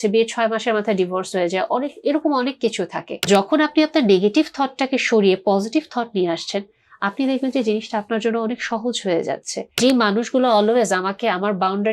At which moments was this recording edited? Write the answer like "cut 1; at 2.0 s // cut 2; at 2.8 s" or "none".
cut 1; at 3.3 s // cut 2; at 9.8 s